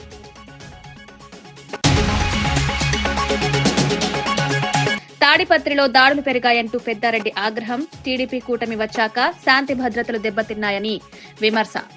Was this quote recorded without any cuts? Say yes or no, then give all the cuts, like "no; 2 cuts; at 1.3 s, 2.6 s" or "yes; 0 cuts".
no; 2 cuts; at 1.8 s, 5.0 s